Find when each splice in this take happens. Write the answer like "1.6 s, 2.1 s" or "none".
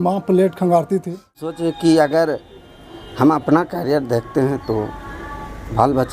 1.6 s